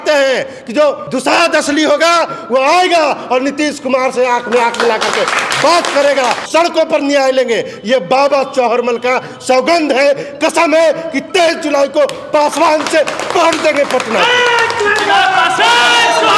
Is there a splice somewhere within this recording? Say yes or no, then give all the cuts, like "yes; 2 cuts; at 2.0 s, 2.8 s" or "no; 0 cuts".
yes; 2 cuts; at 1.1 s, 6.5 s